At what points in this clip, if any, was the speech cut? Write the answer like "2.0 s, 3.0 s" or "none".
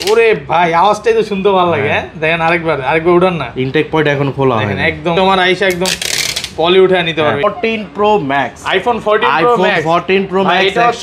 5.1 s, 7.4 s

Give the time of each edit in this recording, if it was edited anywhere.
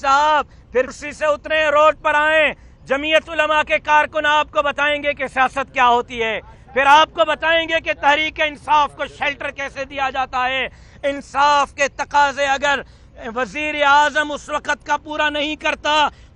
1.0 s

